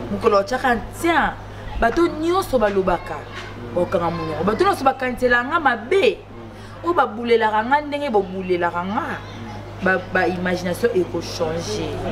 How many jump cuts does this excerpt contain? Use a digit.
0